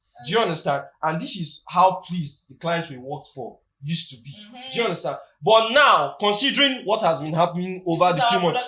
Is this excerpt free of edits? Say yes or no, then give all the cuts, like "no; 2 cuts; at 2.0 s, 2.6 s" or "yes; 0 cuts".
yes; 0 cuts